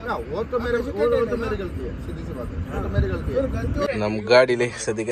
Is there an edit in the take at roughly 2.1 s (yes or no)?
no